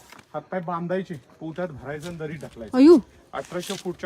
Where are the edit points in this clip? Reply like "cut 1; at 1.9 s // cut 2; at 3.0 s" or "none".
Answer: none